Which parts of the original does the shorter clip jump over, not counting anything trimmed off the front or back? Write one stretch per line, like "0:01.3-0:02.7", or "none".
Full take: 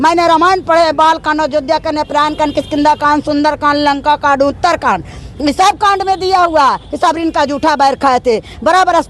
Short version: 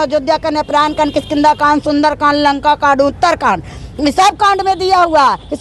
none